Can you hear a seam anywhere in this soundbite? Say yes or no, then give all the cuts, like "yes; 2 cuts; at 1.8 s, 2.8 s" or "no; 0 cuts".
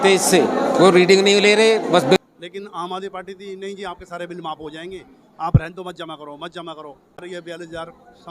yes; 2 cuts; at 2.2 s, 7.2 s